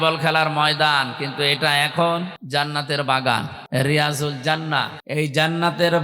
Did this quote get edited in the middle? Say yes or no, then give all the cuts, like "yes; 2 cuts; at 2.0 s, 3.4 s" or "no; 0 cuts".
yes; 3 cuts; at 2.4 s, 3.6 s, 5.0 s